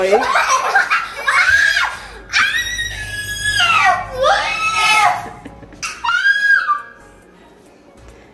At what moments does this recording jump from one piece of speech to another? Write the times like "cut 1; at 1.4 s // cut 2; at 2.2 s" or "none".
cut 1; at 5.8 s